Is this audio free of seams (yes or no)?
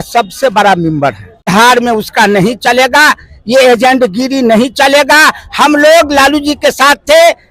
no